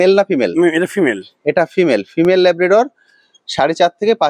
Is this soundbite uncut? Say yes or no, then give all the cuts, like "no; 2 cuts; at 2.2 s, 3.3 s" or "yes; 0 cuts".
yes; 0 cuts